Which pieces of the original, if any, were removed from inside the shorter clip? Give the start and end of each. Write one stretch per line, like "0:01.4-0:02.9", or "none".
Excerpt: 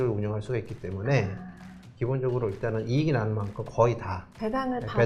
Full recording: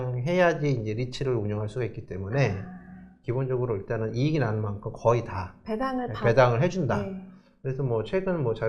none